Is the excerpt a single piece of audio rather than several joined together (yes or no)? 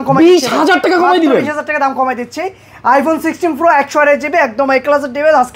yes